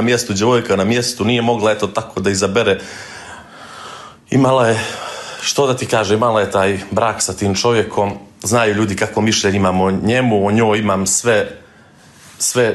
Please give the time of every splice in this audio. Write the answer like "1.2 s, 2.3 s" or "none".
none